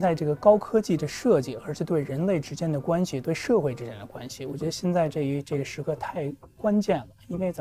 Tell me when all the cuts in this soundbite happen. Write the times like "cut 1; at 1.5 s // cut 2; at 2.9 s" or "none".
none